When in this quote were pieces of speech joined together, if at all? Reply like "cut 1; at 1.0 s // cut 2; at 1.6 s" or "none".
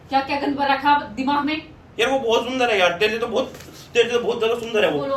none